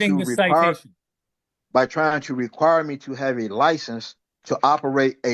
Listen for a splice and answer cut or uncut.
uncut